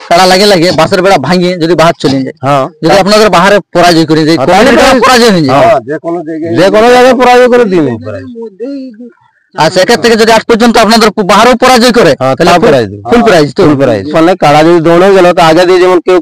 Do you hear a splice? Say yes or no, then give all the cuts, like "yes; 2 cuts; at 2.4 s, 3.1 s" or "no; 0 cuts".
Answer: yes; 1 cut; at 14.1 s